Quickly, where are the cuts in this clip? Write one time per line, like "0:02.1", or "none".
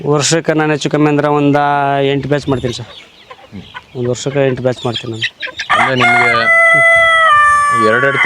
none